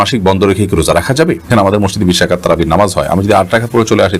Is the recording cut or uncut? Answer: cut